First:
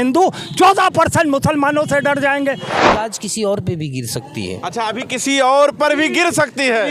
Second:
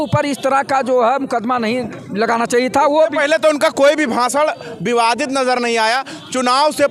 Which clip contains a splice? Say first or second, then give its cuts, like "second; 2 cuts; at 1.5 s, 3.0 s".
first; 1 cut; at 2.9 s